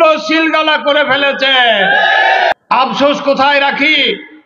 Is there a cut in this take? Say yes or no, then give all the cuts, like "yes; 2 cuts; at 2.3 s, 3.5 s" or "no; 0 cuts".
yes; 1 cut; at 2.5 s